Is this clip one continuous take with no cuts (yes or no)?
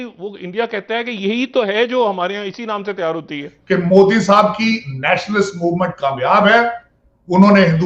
no